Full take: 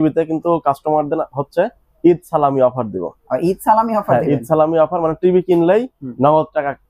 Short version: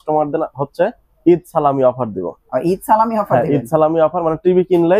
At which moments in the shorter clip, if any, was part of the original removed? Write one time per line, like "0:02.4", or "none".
none